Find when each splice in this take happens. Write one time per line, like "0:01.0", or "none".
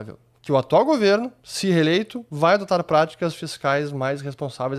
0:02.2